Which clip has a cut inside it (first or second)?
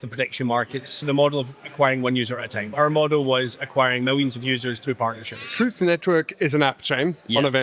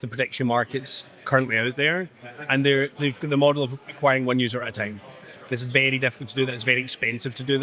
first